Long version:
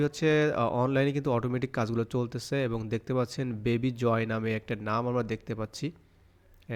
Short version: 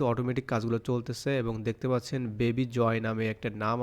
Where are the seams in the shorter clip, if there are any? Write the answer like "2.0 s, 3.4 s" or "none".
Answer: none